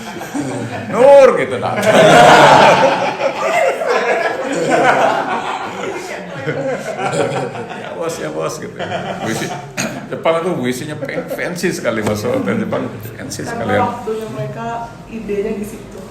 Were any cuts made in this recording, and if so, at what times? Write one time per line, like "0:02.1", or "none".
none